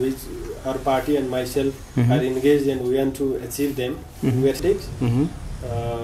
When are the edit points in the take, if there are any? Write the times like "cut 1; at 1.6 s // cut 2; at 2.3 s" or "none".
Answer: cut 1; at 4.6 s